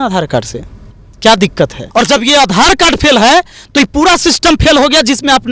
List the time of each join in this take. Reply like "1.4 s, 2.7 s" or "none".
1.8 s